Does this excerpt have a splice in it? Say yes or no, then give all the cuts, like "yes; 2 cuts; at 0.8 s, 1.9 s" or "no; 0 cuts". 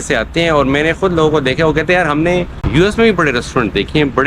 yes; 1 cut; at 2.6 s